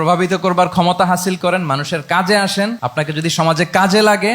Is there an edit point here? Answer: yes; 1 cut; at 2.8 s

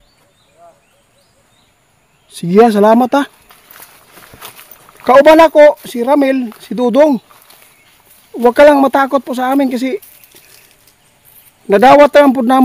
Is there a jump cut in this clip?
no; 0 cuts

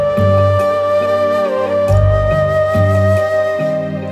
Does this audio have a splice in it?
no; 0 cuts

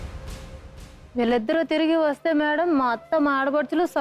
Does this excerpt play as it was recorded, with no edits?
no; 1 cut; at 1.0 s

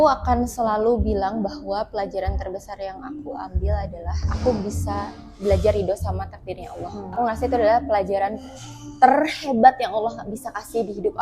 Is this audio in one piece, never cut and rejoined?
no; 2 cuts; at 4.3 s, 7.1 s

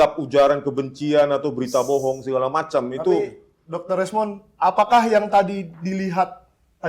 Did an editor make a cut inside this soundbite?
no; 0 cuts

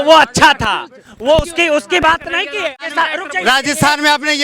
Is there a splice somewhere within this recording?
yes; 1 cut; at 2.8 s

